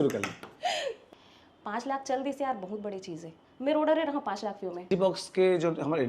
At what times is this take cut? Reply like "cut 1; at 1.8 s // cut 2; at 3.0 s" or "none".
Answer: cut 1; at 1.1 s // cut 2; at 4.9 s